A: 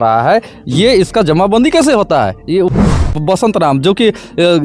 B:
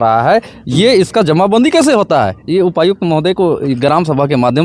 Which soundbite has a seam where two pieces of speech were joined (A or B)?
A